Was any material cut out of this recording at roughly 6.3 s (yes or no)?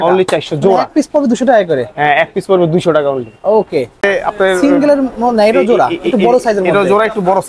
no